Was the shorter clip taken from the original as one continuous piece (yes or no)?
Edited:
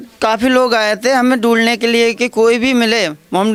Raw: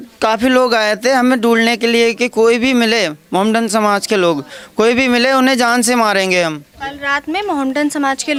yes